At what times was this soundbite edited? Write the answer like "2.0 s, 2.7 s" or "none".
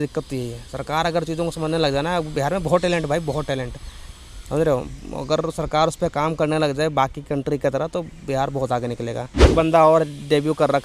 9.5 s